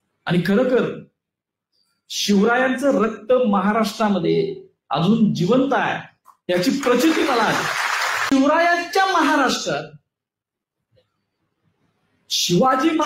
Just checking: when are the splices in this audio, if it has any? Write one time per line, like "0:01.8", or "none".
0:08.2